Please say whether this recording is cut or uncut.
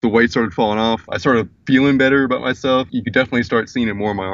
cut